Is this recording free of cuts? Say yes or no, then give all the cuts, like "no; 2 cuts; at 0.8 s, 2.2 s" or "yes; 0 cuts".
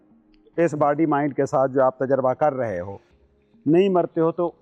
yes; 0 cuts